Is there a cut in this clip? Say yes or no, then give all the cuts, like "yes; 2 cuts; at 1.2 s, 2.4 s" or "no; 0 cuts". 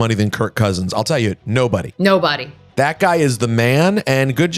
no; 0 cuts